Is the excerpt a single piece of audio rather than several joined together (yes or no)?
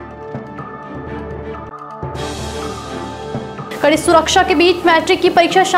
no